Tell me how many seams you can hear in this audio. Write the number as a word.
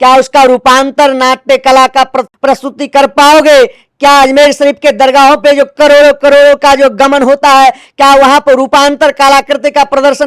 one